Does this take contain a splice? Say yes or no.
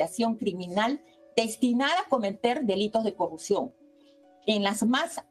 no